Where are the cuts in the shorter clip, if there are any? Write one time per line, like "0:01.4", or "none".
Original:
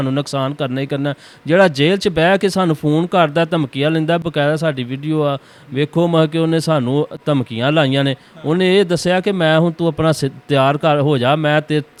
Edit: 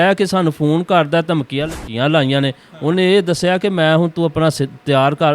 0:01.8

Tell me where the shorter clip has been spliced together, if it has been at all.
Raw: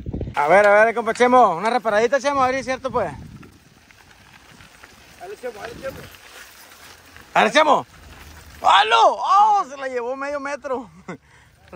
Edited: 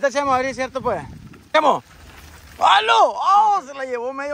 0:01.5

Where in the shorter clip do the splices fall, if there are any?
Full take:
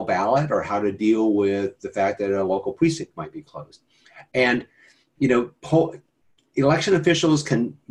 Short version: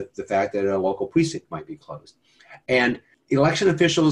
0:03.1

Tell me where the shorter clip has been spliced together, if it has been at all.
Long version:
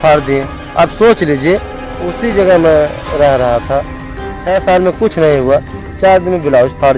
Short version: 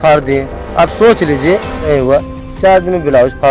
0:01.9

